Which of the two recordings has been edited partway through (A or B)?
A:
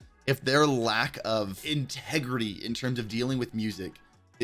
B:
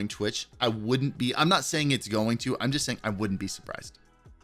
A